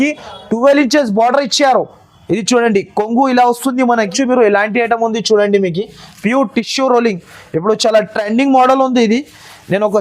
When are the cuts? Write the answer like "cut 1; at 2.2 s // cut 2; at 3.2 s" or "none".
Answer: cut 1; at 4.1 s